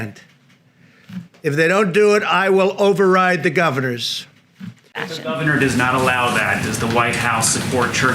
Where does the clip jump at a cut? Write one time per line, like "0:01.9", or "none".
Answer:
0:05.0